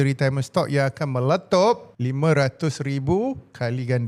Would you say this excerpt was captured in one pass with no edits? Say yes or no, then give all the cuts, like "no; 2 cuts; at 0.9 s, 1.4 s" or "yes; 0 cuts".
yes; 0 cuts